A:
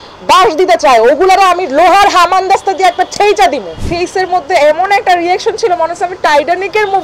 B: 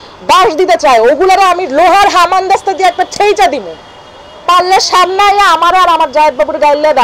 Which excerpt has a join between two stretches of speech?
A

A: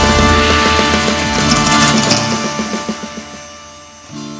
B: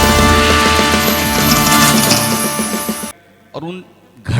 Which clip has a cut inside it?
B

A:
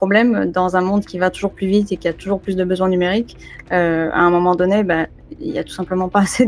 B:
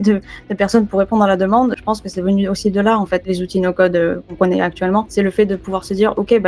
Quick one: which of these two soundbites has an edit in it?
B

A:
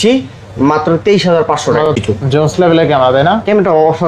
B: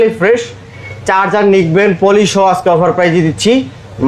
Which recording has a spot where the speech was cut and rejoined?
A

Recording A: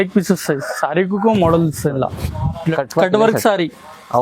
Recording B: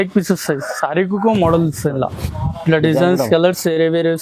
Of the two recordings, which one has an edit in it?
A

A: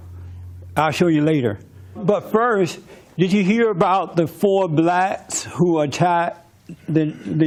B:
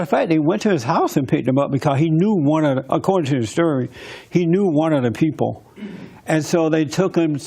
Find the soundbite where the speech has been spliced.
B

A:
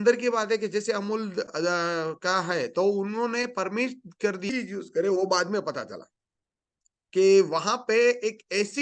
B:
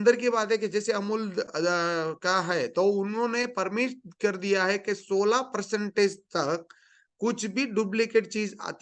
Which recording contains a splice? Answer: A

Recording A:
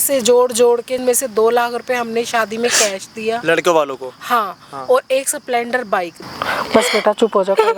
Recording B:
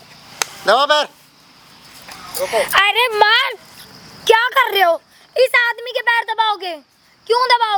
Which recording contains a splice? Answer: A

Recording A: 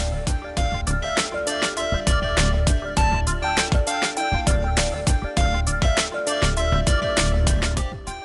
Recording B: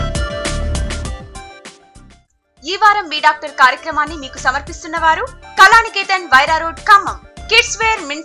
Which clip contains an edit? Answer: B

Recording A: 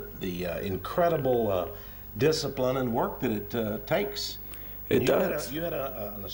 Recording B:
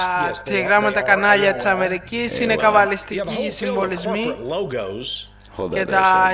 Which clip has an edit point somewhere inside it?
A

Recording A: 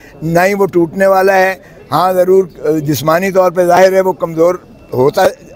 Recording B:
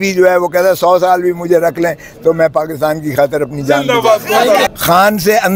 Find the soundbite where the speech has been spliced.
B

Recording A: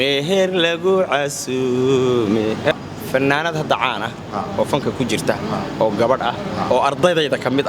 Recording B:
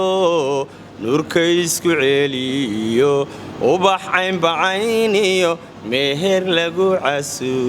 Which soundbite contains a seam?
A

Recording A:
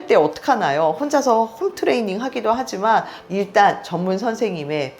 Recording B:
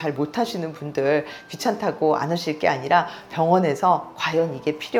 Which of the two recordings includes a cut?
A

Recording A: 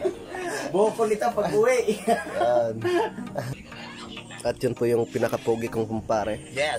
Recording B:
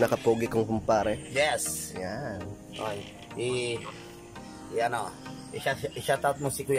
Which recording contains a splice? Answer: A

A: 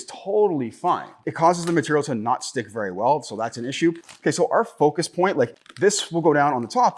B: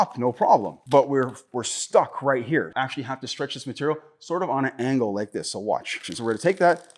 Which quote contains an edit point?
A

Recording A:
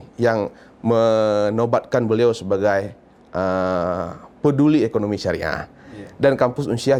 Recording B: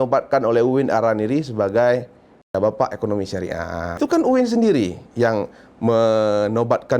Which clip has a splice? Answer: B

